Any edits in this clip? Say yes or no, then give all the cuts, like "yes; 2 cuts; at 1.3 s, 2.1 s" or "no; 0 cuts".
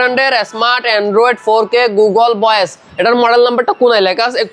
no; 0 cuts